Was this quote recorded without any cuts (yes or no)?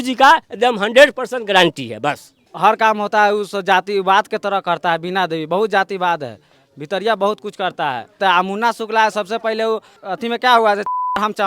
no